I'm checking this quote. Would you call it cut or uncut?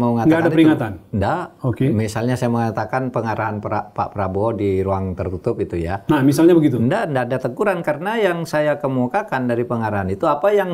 uncut